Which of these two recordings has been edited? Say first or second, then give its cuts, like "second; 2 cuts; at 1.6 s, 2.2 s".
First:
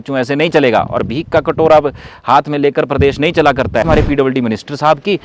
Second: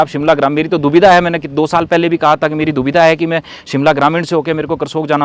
first; 1 cut; at 3.8 s